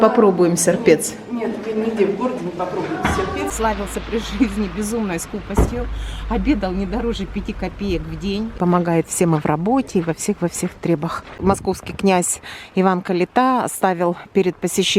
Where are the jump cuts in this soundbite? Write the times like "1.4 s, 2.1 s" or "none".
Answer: 3.5 s, 8.5 s, 11.3 s